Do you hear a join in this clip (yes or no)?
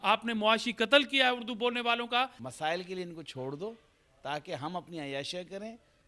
yes